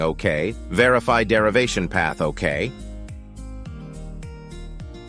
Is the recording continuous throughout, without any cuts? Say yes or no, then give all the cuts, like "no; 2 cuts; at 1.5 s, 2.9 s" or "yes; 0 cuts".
yes; 0 cuts